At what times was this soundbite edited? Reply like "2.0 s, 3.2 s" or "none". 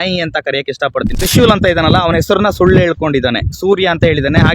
1.1 s